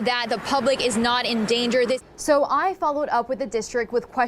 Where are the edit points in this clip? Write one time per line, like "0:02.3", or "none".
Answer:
0:02.0